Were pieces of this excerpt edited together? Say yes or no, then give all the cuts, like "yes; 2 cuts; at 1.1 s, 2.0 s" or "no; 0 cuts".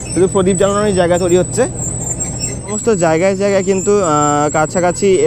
no; 0 cuts